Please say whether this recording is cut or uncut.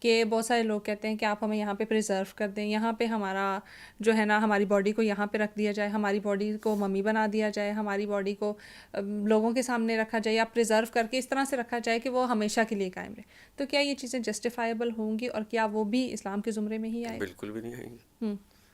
uncut